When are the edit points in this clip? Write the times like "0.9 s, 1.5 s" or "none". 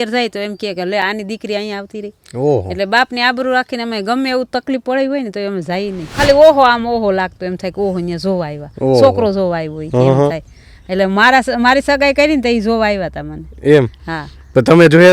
6.1 s